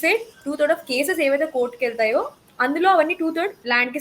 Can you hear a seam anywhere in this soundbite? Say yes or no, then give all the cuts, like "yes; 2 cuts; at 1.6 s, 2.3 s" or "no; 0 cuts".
no; 0 cuts